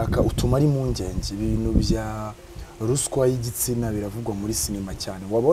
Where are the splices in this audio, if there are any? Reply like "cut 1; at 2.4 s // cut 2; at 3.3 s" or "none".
none